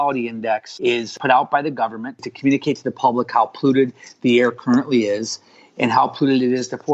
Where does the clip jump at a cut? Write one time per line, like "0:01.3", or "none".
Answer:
0:01.1
0:02.3